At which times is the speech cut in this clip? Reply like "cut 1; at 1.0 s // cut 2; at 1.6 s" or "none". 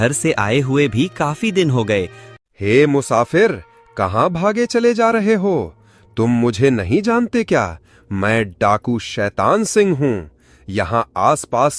cut 1; at 2.2 s